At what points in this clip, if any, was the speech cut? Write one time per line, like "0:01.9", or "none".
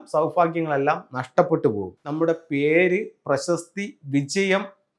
0:01.9